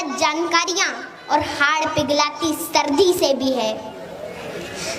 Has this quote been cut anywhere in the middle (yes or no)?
no